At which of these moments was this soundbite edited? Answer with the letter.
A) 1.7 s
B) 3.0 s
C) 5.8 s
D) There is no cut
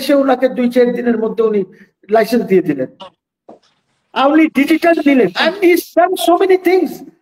D